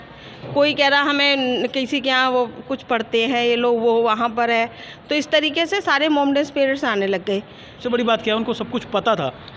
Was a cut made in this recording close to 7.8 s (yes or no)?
yes